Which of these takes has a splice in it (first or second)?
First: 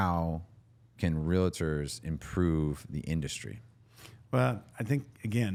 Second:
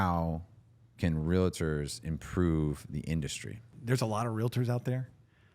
second